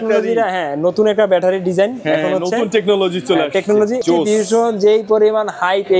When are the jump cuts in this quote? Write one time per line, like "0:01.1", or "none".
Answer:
0:04.0